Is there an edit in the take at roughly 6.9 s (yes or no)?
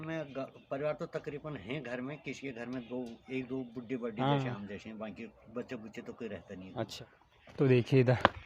yes